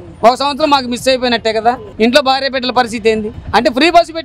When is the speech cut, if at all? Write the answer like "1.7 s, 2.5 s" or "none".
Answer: 1.9 s, 3.3 s